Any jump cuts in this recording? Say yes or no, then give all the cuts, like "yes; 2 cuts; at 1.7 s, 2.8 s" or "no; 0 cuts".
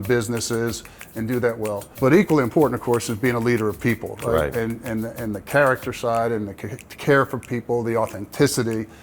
yes; 1 cut; at 1.9 s